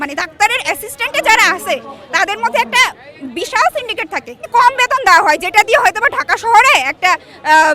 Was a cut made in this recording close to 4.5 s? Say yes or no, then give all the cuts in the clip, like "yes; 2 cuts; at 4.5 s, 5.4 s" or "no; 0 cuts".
yes; 1 cut; at 4.5 s